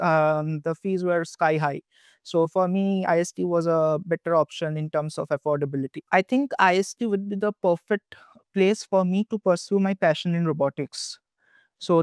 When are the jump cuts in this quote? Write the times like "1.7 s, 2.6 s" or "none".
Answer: 6.0 s